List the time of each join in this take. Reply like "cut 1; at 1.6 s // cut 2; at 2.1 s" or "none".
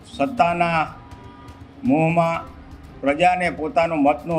none